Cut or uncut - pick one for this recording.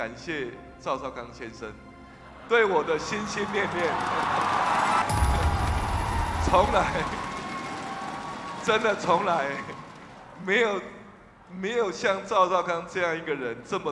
cut